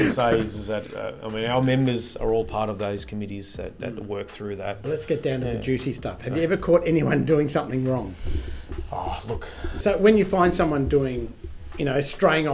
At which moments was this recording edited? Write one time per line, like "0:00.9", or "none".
0:04.8
0:09.7